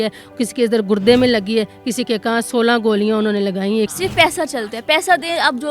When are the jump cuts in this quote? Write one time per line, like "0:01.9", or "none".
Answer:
0:03.9